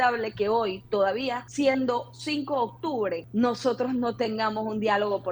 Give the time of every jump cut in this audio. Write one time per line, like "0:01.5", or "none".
0:01.4
0:03.2